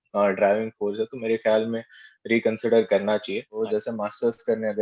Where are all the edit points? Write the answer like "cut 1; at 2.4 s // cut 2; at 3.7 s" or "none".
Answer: cut 1; at 3.6 s